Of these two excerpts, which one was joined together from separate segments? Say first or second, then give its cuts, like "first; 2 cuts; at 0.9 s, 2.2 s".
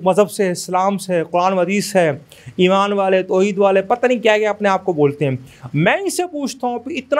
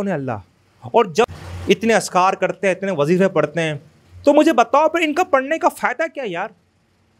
second; 1 cut; at 1.3 s